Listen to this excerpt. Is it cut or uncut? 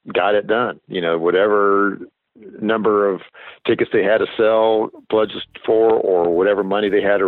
uncut